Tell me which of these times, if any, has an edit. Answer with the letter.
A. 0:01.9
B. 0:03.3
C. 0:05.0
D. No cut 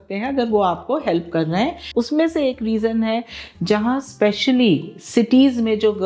A